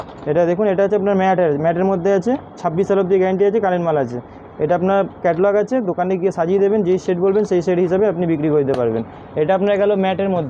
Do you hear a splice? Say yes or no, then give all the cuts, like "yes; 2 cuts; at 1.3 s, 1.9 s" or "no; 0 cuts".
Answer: no; 0 cuts